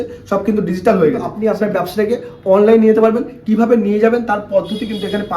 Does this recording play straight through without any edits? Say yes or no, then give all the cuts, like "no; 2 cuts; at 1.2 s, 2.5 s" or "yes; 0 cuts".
no; 1 cut; at 1.3 s